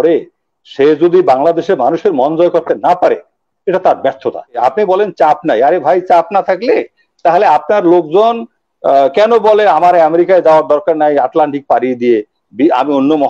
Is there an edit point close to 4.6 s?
yes; 1 cut; at 4.6 s

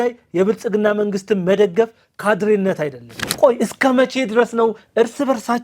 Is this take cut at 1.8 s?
no; 1 cut; at 3.2 s

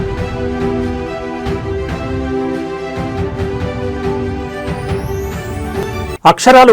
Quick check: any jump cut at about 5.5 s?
no; 0 cuts

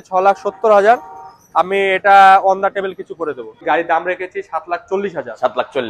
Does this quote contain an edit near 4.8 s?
no; 1 cut; at 3.6 s

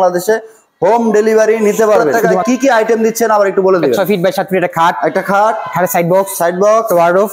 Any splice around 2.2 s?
yes; 1 cut; at 2.2 s

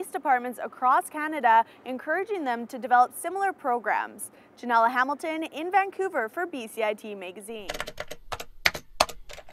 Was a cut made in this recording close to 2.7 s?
no; 1 cut; at 7.6 s

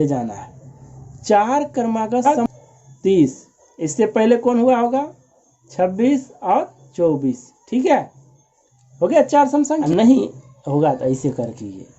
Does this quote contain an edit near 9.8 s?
yes; 2 cuts; at 2.3 s, 9.8 s

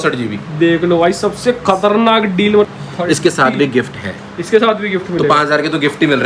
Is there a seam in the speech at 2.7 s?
yes; 1 cut; at 2.7 s

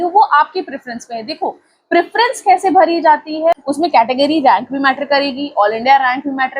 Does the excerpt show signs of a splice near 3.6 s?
yes; 1 cut; at 3.6 s

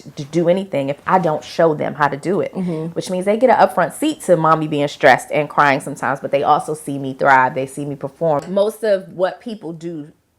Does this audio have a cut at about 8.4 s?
yes; 1 cut; at 8.4 s

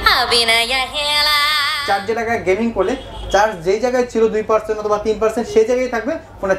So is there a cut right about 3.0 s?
no; 1 cut; at 1.7 s

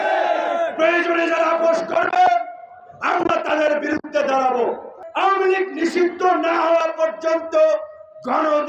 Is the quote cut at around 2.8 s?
no; 1 cut; at 5.0 s

